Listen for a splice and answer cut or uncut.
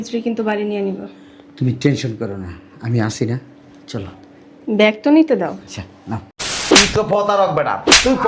cut